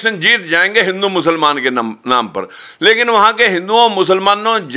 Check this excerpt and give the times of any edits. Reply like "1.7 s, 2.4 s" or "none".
none